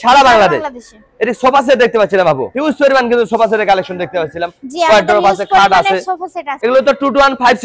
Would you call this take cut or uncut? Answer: uncut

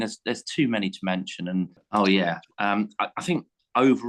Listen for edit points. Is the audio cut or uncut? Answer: cut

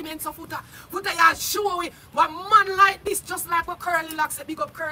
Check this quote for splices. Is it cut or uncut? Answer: uncut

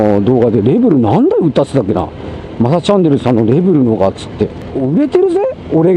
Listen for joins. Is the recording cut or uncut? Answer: cut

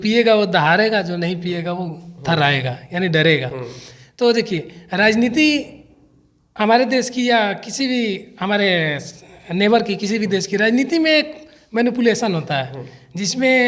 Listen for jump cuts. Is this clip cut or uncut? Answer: uncut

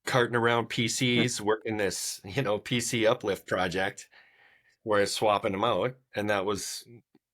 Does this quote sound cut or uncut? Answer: uncut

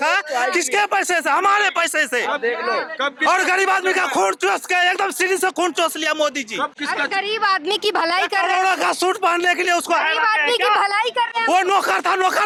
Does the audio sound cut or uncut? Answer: uncut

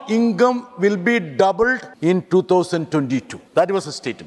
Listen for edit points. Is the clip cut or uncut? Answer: cut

